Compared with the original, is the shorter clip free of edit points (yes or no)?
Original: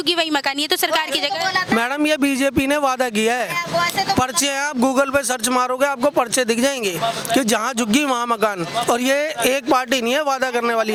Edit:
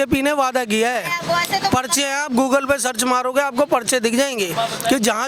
yes